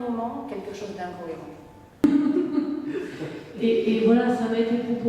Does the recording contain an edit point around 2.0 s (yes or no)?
yes